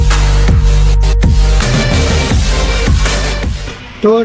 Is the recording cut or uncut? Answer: cut